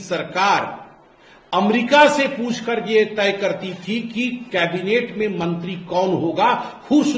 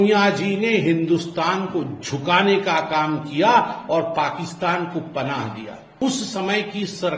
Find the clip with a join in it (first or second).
second